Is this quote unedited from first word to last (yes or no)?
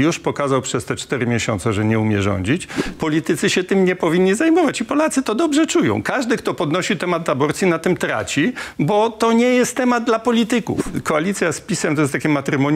no